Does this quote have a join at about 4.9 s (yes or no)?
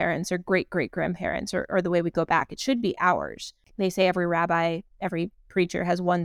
no